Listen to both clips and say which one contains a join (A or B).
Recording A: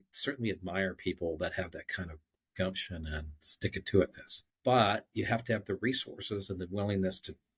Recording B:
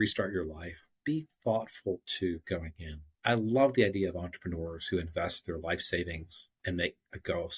B